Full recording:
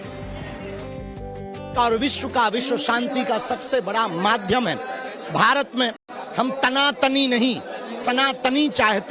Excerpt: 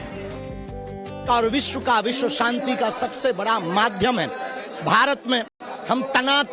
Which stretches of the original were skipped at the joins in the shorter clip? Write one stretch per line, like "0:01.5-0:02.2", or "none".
none